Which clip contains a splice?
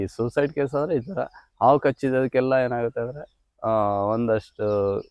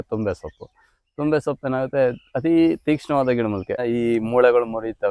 second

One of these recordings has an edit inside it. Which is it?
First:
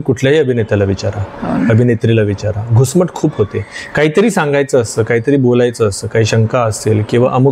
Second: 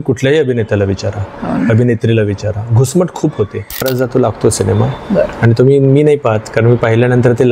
second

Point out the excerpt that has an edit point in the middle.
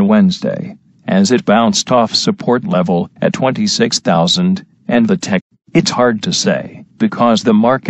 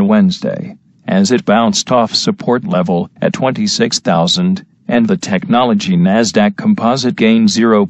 second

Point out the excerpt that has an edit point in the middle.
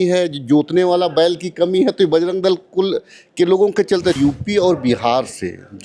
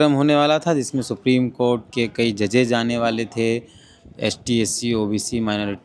first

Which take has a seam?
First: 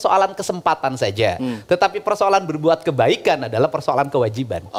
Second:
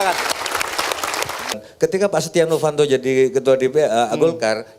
second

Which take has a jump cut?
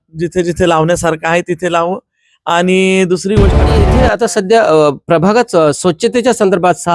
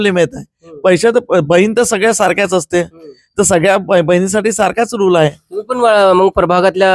first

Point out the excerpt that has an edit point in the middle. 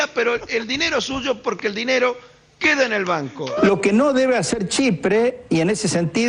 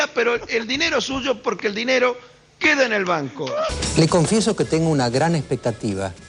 first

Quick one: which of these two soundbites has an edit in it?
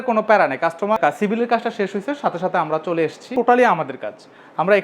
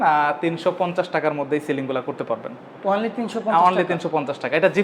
first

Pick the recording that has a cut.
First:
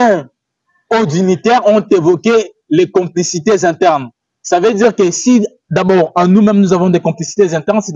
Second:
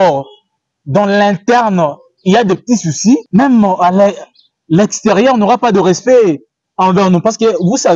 second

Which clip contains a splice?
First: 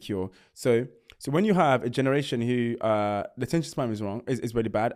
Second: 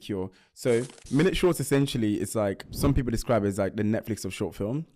second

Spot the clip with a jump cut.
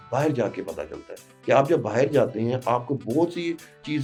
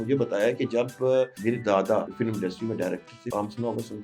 second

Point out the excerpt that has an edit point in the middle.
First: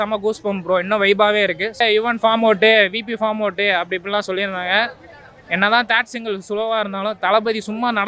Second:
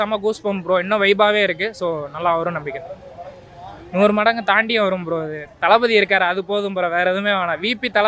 first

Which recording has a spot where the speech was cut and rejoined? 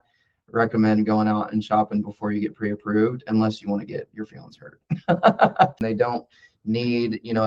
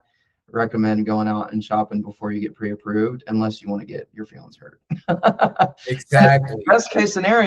first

